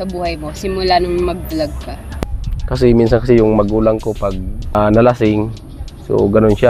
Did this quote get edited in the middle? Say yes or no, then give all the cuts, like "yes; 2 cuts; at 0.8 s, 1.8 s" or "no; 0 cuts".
yes; 2 cuts; at 1.9 s, 4.7 s